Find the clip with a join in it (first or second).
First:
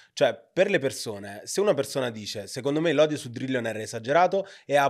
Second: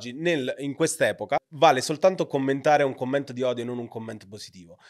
second